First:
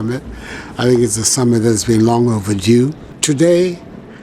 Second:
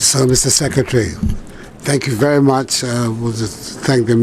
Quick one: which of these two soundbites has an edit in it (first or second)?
first